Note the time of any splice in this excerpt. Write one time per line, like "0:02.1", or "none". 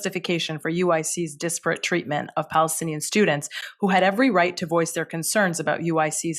none